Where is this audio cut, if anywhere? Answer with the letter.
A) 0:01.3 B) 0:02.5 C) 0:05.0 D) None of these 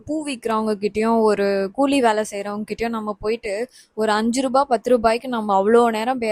D